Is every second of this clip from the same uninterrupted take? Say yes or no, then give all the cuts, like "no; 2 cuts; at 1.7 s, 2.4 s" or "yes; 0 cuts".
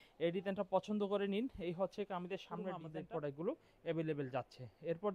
no; 1 cut; at 2.9 s